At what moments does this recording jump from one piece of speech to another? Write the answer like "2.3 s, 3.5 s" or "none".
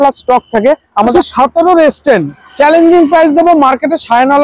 1.1 s